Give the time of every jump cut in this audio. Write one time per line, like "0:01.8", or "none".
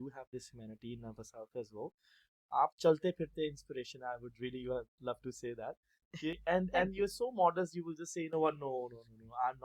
none